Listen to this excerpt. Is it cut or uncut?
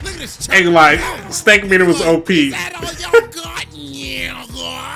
uncut